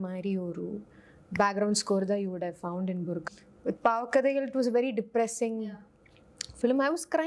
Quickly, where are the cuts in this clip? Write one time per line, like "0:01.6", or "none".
0:03.2